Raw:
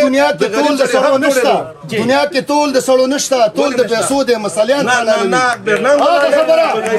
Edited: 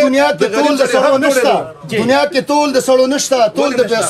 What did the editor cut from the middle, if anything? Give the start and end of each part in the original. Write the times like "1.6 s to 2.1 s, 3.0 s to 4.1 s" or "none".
none